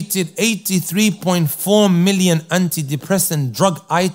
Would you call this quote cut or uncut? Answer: uncut